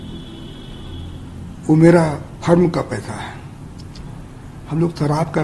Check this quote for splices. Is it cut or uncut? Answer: uncut